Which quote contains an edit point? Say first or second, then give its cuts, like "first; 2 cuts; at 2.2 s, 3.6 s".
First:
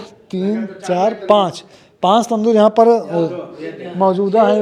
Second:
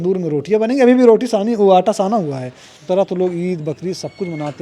second; 1 cut; at 2.7 s